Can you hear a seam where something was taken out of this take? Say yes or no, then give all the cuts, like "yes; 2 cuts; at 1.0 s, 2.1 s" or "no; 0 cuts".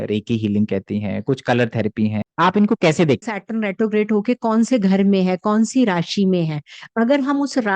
yes; 2 cuts; at 2.2 s, 3.2 s